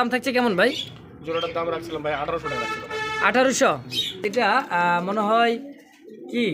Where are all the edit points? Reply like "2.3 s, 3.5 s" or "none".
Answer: 4.3 s